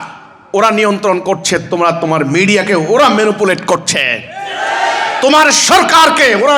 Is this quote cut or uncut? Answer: uncut